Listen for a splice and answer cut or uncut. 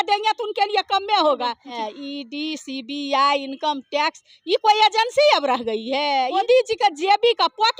cut